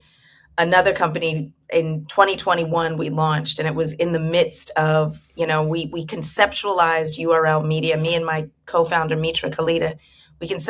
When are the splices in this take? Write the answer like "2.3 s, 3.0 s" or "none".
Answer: none